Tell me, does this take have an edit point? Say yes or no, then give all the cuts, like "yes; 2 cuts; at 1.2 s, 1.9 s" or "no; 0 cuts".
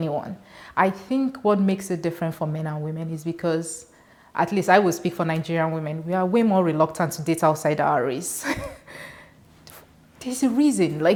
no; 0 cuts